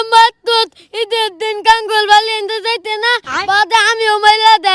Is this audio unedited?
yes; 0 cuts

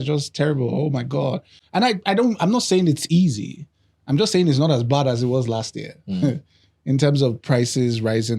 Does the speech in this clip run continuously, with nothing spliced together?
yes; 0 cuts

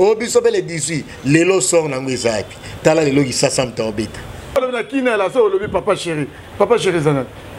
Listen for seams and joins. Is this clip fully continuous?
no; 1 cut; at 4.6 s

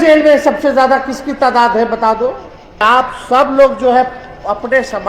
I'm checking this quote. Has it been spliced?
yes; 1 cut; at 2.8 s

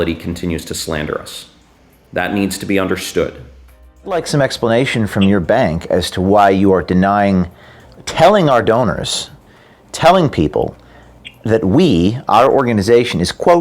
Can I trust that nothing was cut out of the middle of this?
no; 1 cut; at 4.1 s

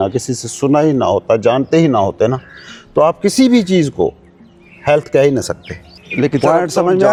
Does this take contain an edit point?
no; 0 cuts

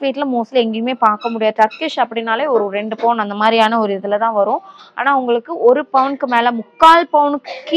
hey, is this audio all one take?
yes; 0 cuts

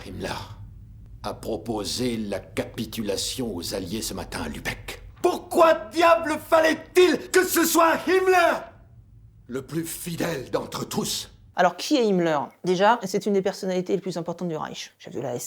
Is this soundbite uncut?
yes; 0 cuts

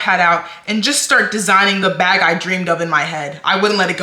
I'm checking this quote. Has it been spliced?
yes; 1 cut; at 1.8 s

